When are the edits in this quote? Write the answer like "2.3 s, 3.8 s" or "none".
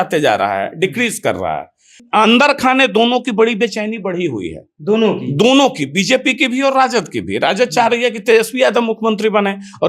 2.0 s